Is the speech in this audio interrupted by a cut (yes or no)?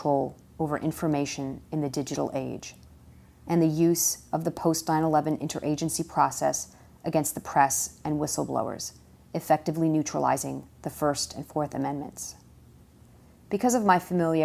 yes